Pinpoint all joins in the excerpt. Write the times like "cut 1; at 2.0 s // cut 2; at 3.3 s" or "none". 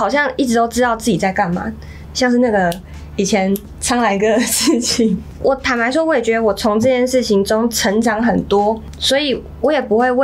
cut 1; at 2.0 s // cut 2; at 5.3 s

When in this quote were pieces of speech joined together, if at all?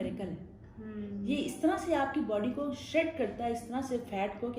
none

